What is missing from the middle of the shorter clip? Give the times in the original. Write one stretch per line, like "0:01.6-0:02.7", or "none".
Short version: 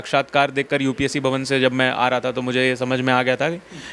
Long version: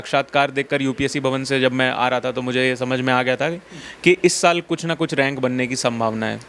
none